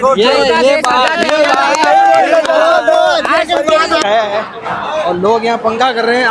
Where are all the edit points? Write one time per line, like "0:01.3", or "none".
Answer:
0:04.0